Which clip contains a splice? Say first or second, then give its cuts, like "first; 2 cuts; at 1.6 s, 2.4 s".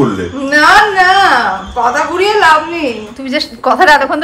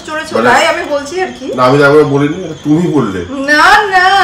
first; 1 cut; at 3.1 s